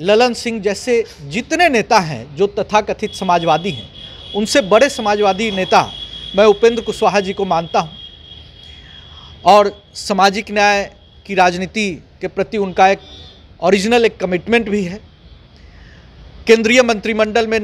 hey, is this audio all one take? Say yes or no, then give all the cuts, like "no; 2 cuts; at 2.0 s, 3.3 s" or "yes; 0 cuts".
yes; 0 cuts